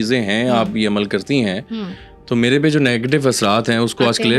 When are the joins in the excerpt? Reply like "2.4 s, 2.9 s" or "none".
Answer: none